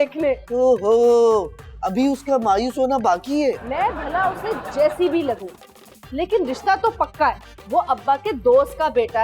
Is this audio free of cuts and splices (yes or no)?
yes